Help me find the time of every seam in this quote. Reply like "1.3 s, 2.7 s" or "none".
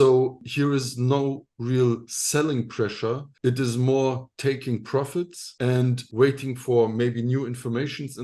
none